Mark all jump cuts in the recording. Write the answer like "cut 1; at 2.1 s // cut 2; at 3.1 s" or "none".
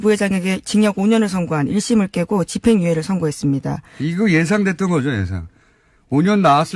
cut 1; at 2.3 s